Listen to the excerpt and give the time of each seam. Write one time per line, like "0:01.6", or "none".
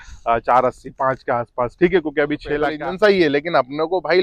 0:02.7